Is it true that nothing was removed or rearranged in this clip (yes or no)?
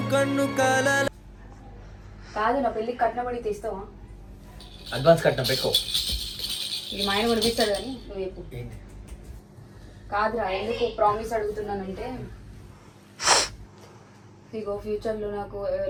yes